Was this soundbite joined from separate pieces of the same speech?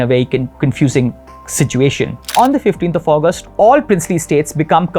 yes; 1 cut; at 2.3 s

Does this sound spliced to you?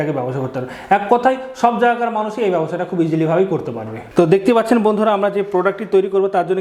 yes; 1 cut; at 4.1 s

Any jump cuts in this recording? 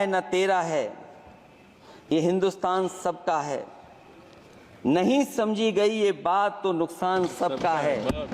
no; 0 cuts

